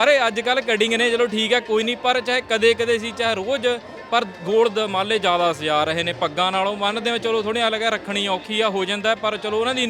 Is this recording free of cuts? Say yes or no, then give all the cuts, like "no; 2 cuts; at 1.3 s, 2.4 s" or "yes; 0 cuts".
yes; 0 cuts